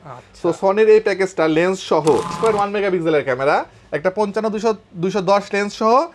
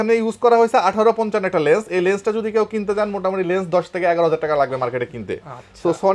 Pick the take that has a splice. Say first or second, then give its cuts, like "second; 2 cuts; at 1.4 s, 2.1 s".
first; 1 cut; at 2.3 s